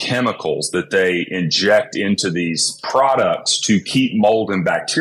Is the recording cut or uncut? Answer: uncut